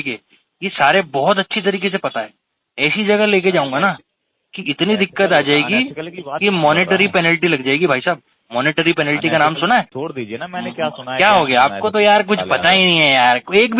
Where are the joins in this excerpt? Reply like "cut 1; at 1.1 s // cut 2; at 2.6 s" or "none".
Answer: cut 1; at 9.9 s